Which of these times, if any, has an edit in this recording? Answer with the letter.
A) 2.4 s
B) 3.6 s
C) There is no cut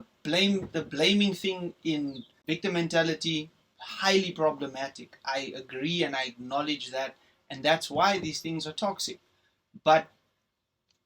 A